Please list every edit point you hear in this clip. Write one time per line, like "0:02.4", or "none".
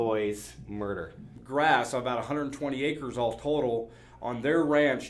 none